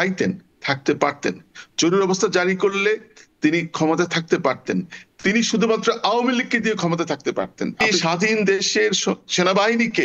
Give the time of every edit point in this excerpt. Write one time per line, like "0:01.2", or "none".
0:07.9